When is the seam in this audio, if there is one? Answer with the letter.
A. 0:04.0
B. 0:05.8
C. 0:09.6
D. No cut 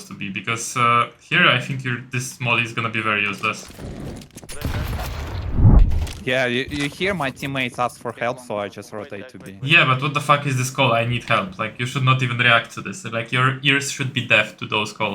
B